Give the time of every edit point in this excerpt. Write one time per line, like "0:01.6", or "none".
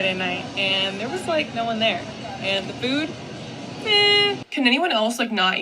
0:04.4